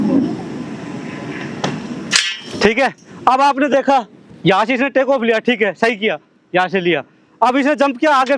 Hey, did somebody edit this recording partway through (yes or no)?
no